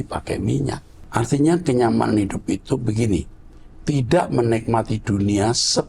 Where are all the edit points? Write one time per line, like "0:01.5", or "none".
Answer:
0:01.0